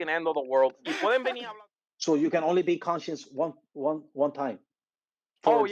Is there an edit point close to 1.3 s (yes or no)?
yes